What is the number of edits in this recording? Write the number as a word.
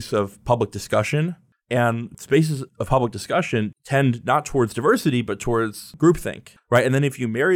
three